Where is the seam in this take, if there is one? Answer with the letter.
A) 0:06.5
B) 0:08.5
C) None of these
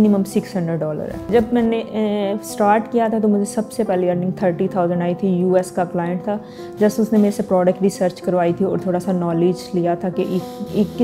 C